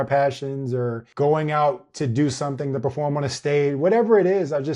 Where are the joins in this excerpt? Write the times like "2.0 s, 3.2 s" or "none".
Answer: 1.0 s